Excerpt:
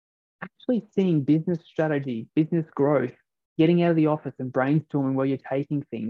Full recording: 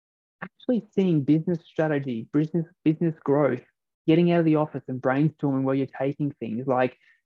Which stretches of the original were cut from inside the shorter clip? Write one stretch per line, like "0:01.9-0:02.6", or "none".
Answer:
0:02.2-0:02.7